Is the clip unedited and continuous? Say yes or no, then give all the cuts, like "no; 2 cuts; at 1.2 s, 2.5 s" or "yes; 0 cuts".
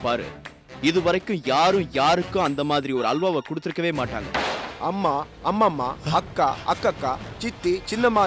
no; 1 cut; at 4.5 s